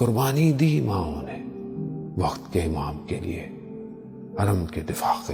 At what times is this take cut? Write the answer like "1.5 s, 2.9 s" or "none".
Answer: none